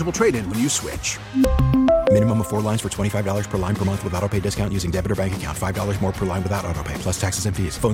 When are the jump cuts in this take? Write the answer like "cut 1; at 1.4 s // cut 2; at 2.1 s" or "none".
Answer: none